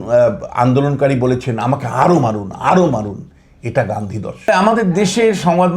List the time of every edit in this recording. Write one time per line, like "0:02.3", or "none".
0:04.5

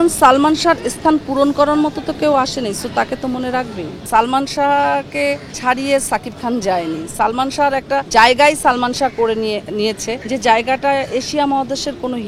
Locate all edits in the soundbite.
0:04.0
0:05.5
0:08.1
0:10.1

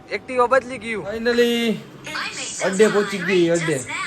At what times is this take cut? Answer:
0:01.2

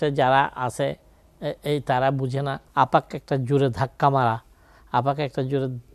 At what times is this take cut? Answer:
0:02.6

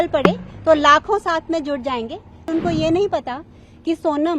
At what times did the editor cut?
0:02.5

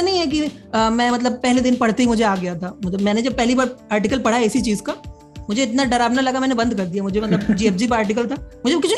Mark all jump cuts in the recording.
none

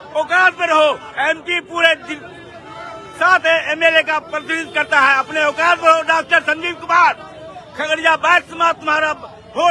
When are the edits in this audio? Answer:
none

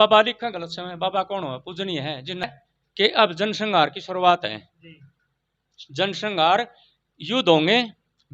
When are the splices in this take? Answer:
0:02.6

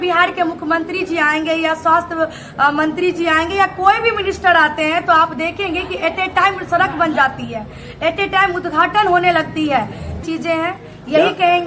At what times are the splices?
0:10.2

